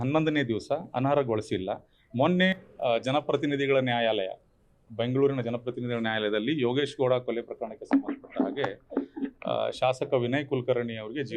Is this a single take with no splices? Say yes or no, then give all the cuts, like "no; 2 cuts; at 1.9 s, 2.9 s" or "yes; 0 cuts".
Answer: no; 1 cut; at 2.5 s